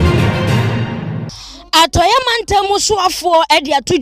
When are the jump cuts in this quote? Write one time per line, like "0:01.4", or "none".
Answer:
0:01.1